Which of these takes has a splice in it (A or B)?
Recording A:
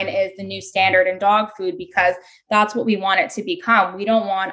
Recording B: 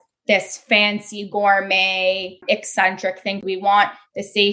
B